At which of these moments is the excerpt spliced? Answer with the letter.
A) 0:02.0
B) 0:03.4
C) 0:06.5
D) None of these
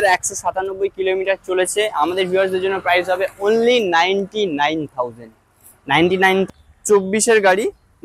C